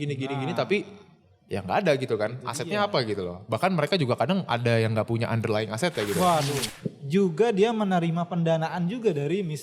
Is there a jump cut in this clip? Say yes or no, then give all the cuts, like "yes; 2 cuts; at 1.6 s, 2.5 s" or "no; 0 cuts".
yes; 1 cut; at 6.7 s